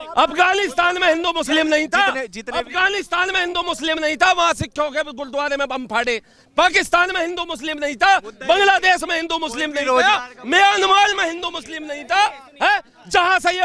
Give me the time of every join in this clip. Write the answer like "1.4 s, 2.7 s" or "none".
none